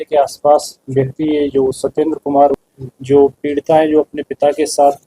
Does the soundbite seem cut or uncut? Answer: cut